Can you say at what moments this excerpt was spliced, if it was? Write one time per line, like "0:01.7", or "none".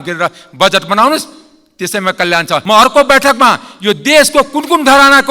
0:02.6